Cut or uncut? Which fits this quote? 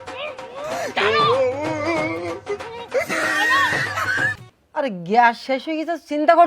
cut